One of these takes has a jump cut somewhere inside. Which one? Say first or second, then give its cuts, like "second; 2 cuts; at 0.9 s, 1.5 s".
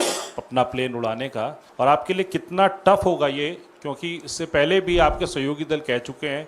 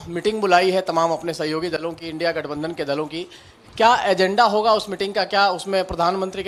first; 1 cut; at 1.6 s